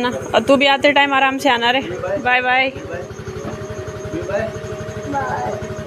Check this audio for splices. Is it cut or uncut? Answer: uncut